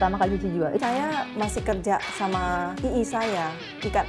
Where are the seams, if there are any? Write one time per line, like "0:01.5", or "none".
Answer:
0:00.8
0:02.7